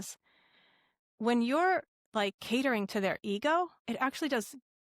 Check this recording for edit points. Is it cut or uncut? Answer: cut